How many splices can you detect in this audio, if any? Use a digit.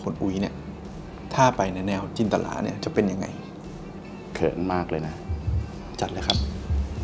0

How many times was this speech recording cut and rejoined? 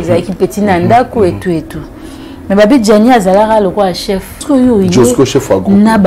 1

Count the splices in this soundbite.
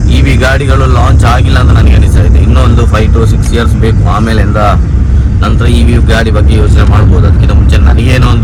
0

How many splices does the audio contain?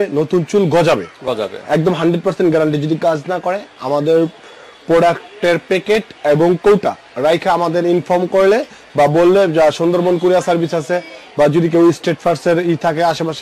0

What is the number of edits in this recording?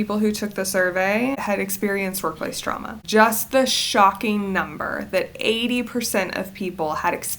2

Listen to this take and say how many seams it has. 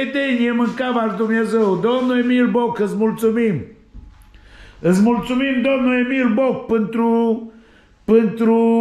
0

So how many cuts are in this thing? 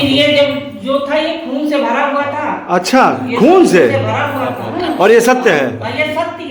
0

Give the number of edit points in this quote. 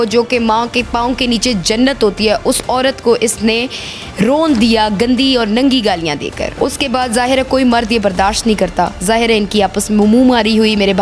0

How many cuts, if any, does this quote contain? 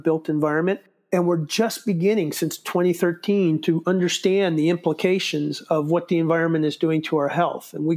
0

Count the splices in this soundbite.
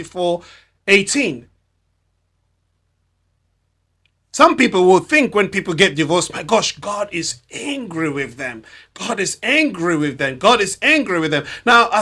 0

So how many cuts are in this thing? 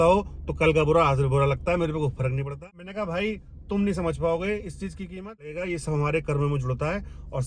2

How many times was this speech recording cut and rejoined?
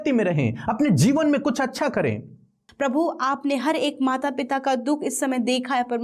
1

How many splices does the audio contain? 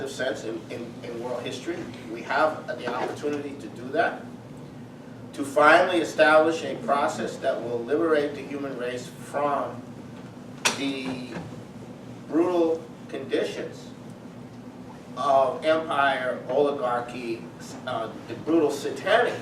1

